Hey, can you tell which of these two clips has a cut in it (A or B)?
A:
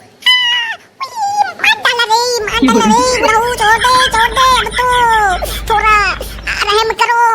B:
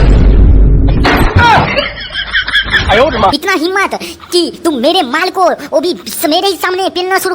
B